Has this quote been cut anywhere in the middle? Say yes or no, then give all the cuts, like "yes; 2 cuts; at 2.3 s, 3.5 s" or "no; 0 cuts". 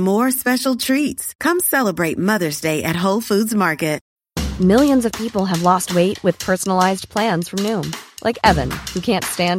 yes; 1 cut; at 4.1 s